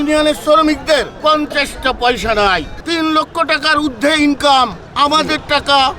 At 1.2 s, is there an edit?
no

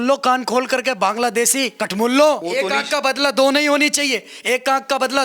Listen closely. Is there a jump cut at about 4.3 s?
no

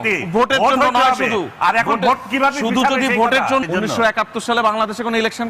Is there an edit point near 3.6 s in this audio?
yes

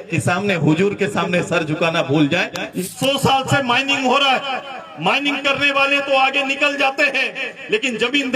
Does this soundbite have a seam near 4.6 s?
no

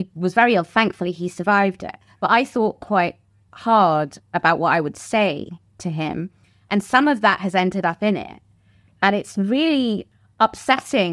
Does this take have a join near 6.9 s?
no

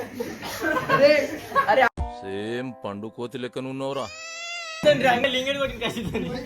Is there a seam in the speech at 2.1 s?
no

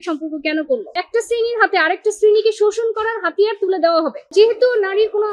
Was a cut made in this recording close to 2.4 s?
no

